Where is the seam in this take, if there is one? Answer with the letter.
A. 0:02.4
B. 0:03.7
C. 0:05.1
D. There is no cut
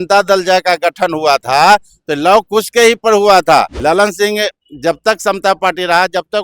B